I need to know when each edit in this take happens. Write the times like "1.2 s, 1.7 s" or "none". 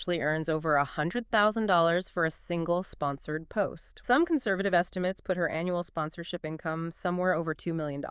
none